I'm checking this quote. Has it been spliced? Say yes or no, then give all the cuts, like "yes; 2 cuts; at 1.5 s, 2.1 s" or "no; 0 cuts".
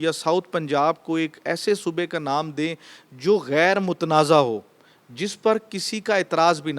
no; 0 cuts